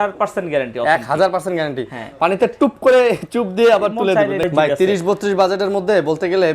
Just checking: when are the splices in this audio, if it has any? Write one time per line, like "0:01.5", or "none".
0:04.5